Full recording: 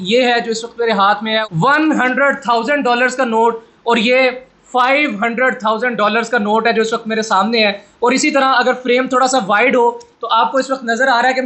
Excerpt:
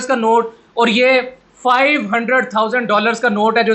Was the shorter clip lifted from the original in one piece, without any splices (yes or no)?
yes